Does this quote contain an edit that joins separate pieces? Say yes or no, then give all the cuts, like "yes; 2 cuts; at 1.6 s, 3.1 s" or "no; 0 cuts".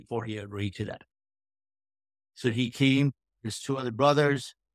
no; 0 cuts